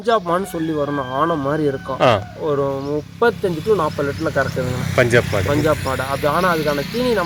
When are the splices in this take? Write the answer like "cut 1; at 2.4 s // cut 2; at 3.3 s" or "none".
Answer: none